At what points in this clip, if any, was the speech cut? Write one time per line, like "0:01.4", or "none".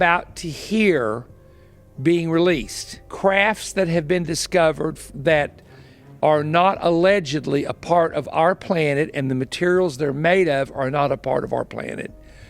0:03.0